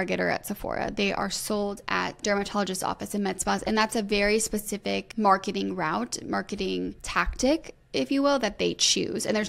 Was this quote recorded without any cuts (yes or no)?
no